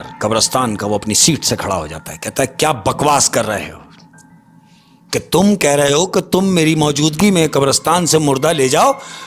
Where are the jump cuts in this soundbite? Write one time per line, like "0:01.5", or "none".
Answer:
none